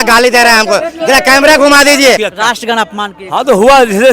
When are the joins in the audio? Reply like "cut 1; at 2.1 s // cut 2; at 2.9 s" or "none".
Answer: cut 1; at 2.2 s